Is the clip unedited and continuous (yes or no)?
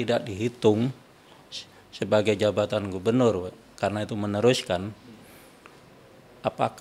yes